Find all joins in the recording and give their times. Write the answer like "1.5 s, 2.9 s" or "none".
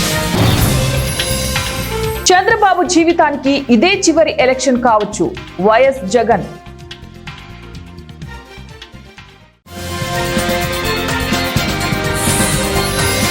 none